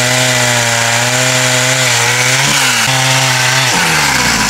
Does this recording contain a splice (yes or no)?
yes